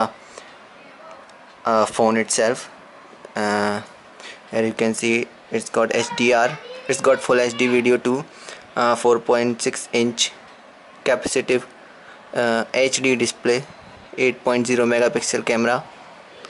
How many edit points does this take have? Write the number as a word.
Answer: one